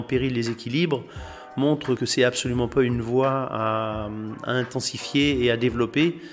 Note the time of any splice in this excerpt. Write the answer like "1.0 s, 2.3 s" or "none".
2.0 s